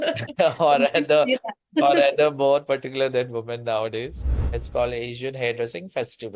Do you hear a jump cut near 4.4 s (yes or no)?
yes